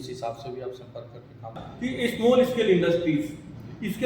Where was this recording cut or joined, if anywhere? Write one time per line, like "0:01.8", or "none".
0:01.6